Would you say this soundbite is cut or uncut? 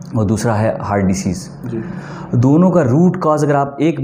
uncut